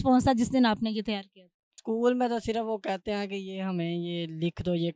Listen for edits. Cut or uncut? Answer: cut